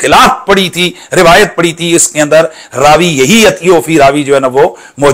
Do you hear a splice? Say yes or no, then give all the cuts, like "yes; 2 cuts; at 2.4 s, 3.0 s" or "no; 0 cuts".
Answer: no; 0 cuts